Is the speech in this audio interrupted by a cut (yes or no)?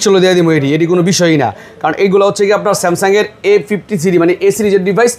no